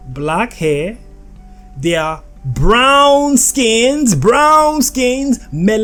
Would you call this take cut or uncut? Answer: uncut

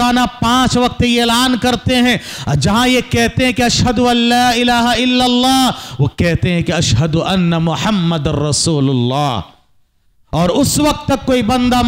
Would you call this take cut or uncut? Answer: uncut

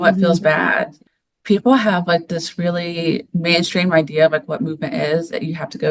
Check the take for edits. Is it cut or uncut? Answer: cut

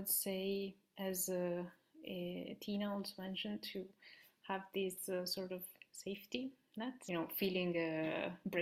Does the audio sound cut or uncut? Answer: cut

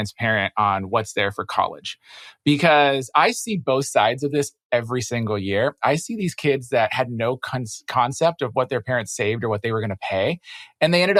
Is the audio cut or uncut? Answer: uncut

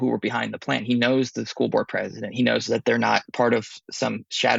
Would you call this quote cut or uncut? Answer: cut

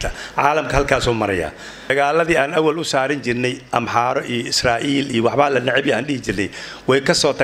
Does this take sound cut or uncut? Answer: cut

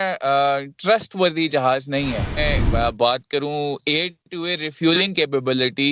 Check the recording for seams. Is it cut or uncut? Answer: cut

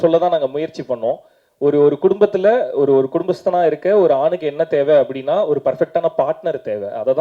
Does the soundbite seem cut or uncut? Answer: uncut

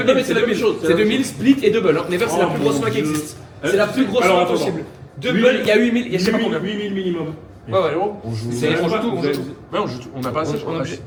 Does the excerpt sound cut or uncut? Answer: uncut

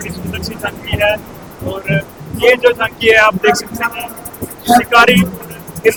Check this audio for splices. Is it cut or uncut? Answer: uncut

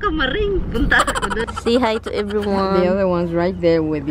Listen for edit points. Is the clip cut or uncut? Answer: cut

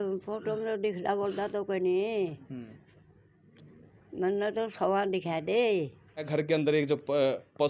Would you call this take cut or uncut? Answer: cut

